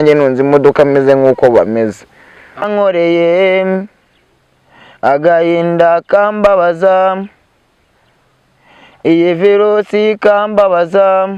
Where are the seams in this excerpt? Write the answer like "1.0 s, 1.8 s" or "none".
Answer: 2.6 s